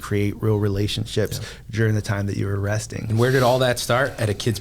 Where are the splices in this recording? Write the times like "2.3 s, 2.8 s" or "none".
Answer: 3.1 s